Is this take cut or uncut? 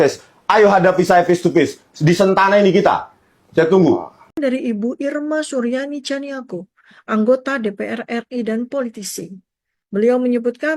cut